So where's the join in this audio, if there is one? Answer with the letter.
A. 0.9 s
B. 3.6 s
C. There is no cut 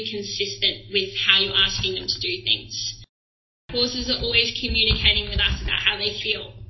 B